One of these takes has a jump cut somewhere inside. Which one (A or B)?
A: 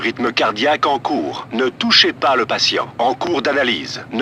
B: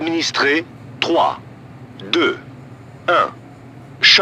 A